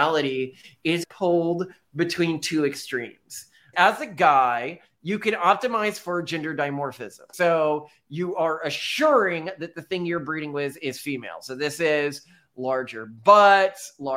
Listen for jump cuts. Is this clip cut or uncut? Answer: cut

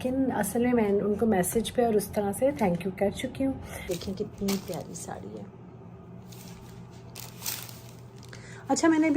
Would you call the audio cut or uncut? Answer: cut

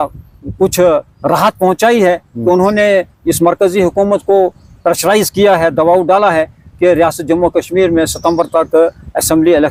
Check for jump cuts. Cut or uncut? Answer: uncut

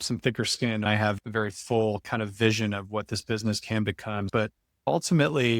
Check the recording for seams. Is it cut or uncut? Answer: cut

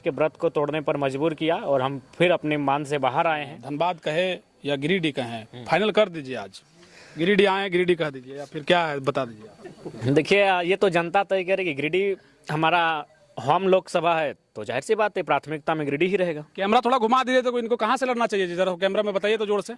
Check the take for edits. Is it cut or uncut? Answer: cut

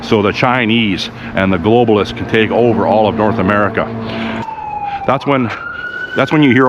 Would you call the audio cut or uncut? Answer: cut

